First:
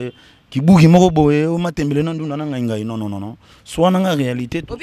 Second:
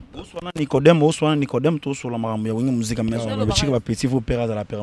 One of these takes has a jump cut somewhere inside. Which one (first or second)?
second